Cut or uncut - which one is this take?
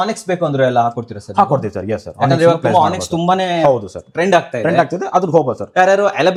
uncut